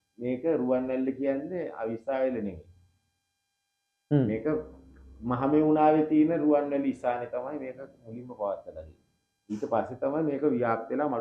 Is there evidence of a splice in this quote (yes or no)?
no